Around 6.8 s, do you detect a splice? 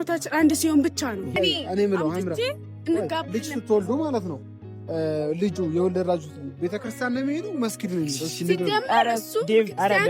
no; 1 cut; at 1.3 s

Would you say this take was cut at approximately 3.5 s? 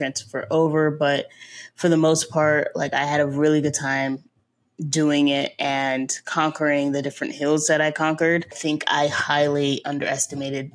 no; 1 cut; at 8.6 s

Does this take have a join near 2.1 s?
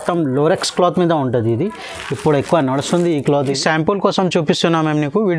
no; 1 cut; at 3.6 s

